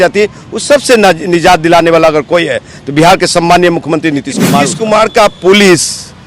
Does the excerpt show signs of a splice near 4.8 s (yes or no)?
yes